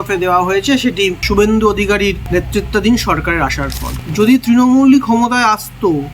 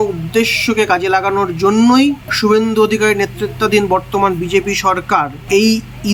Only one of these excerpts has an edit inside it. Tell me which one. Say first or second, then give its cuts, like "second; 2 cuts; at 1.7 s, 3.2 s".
first; 3 cuts; at 1.2 s, 2.2 s, 3.9 s